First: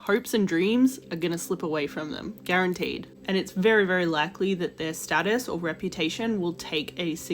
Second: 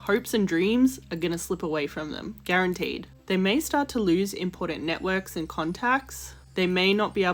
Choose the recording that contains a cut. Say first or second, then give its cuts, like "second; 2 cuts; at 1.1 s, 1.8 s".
first; 1 cut; at 3.1 s